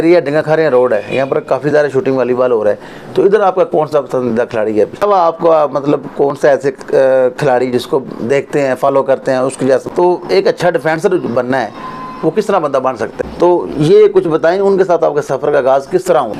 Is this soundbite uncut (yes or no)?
no